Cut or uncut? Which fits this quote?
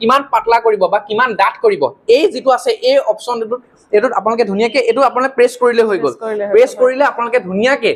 uncut